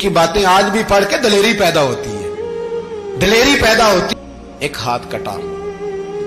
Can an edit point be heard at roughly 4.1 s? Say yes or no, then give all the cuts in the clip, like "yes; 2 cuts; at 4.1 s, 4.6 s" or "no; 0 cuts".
yes; 1 cut; at 4.1 s